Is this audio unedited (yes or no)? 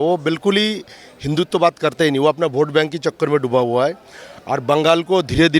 yes